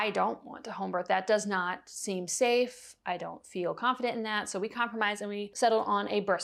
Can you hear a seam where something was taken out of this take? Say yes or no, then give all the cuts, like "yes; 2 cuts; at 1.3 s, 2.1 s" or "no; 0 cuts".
no; 0 cuts